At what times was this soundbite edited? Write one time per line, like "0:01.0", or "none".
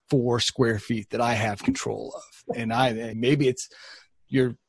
0:03.1